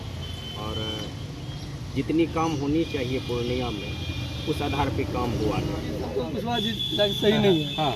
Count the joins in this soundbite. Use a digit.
1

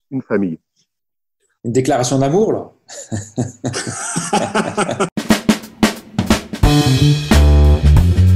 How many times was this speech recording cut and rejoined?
1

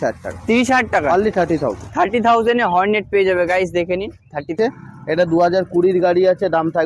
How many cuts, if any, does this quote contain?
1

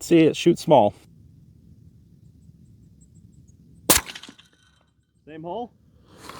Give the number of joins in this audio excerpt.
1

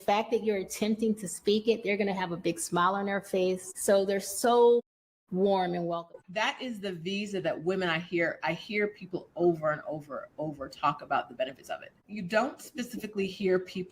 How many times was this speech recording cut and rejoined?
1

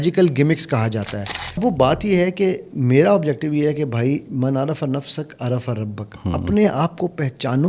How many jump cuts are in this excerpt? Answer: 1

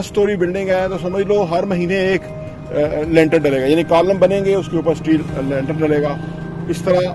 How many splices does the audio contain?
0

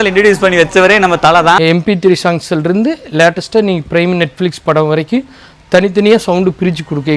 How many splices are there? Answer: 1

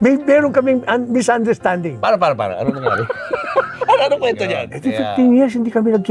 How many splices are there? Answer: 1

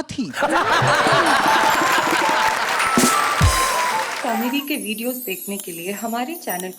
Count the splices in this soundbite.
1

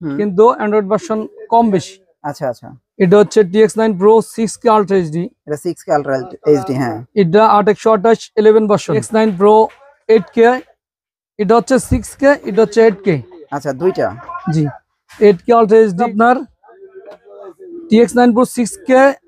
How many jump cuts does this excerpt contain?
2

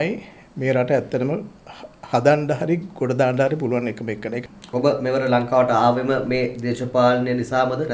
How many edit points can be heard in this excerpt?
1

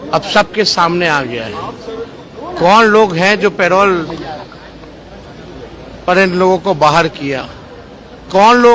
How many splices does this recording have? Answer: 0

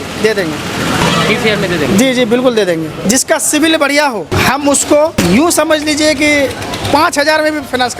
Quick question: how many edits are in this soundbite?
3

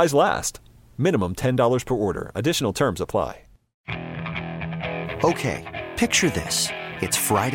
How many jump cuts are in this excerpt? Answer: 1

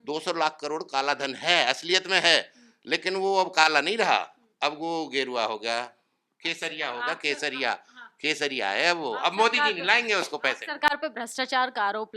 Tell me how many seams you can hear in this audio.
0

